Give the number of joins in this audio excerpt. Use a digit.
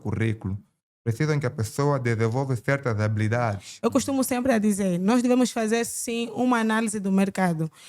1